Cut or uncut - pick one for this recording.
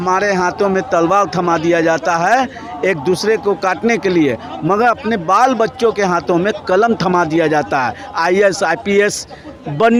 uncut